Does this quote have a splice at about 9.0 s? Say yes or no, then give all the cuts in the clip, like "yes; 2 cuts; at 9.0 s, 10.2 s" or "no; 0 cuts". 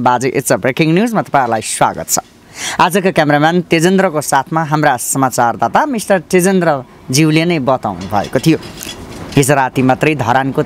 no; 0 cuts